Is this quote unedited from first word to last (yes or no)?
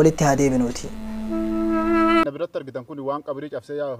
no